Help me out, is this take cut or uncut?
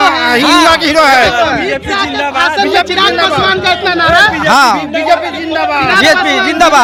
uncut